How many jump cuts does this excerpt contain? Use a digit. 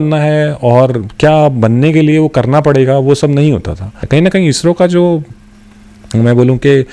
1